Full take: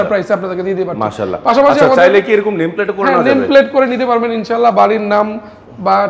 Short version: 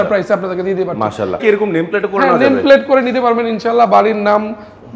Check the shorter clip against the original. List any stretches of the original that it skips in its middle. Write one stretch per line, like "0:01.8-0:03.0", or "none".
0:01.4-0:02.3